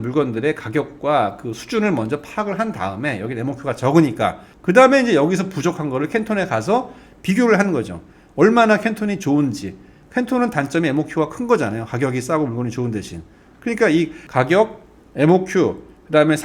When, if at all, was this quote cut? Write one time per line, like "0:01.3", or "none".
none

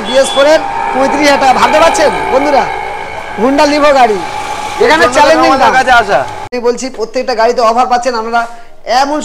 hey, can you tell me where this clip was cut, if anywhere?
0:06.5

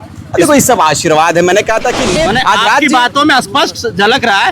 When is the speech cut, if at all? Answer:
0:02.1

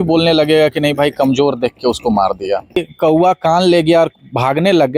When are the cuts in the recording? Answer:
0:02.9

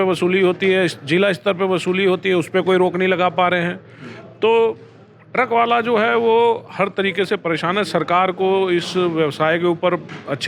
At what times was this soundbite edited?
none

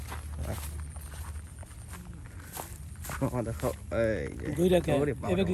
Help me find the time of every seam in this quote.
none

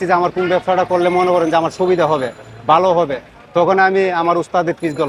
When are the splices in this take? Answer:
none

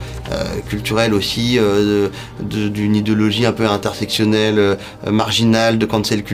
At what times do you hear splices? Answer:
none

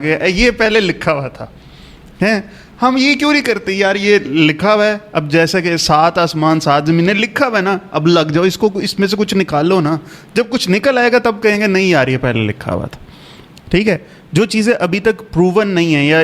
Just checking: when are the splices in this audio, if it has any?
none

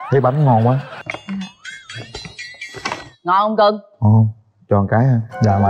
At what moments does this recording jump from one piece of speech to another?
0:00.9

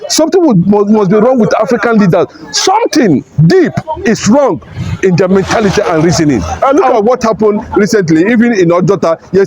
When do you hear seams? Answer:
0:06.6

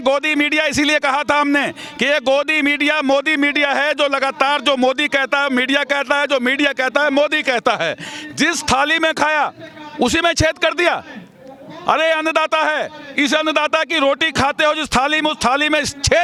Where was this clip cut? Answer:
none

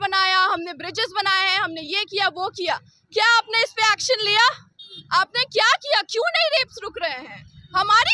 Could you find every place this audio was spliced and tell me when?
none

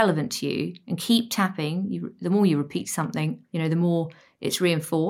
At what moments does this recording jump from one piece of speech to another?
0:03.4

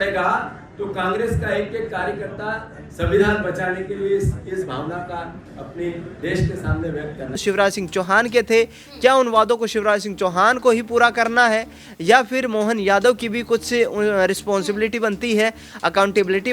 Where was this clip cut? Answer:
0:07.4

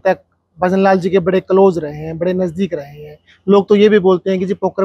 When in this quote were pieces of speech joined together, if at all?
none

